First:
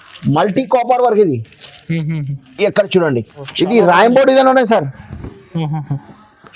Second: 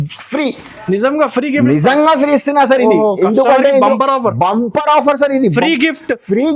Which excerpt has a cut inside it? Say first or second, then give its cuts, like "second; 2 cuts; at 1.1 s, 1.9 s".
first; 1 cut; at 3.5 s